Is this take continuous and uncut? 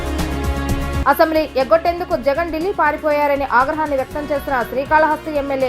no; 1 cut; at 1.0 s

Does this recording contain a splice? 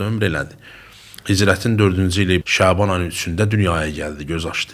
yes; 1 cut; at 2.4 s

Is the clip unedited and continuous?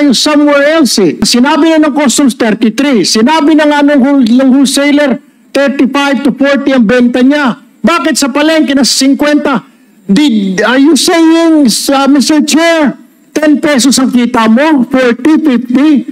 no; 1 cut; at 1.3 s

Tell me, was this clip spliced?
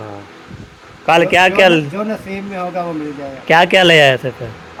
no; 0 cuts

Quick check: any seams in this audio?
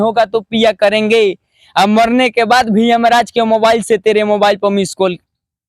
no; 0 cuts

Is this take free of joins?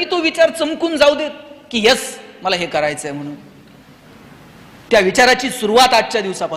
yes; 0 cuts

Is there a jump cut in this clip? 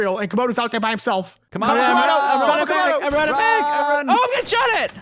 no; 0 cuts

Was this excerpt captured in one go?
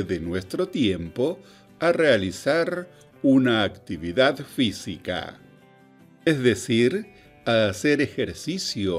yes; 0 cuts

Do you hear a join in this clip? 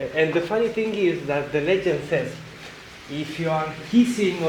no; 0 cuts

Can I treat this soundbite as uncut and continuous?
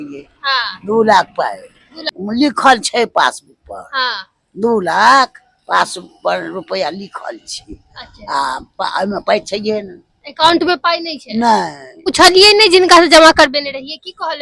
no; 2 cuts; at 2.1 s, 12.1 s

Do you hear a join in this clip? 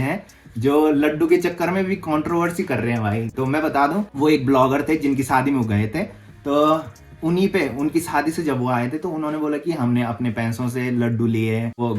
no; 0 cuts

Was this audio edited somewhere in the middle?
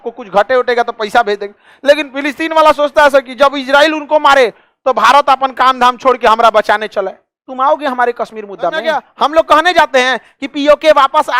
yes; 1 cut; at 8.8 s

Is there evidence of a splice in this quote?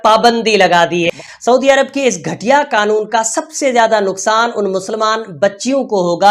yes; 1 cut; at 1.1 s

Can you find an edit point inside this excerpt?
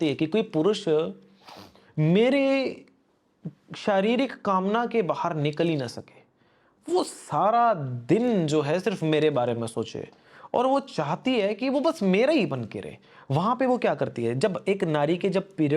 no; 0 cuts

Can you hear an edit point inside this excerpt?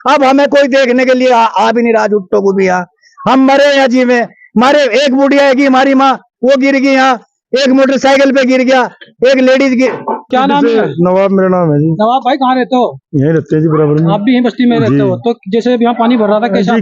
yes; 1 cut; at 10.3 s

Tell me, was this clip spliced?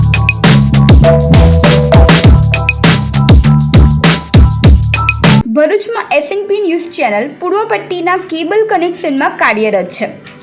yes; 1 cut; at 5.5 s

